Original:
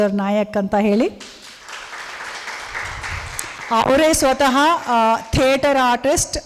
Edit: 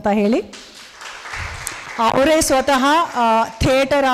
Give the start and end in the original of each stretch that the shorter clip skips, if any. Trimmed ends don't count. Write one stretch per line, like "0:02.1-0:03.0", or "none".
0:02.0-0:03.0